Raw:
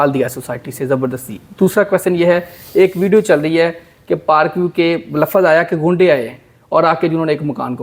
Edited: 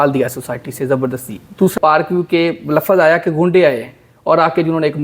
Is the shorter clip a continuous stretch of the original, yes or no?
no